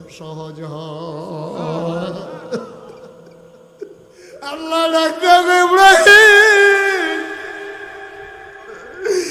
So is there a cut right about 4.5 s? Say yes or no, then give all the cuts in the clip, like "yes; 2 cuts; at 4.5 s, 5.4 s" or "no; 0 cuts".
yes; 1 cut; at 4.5 s